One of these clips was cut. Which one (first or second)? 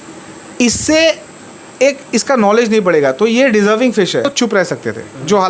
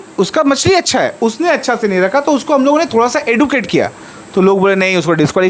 first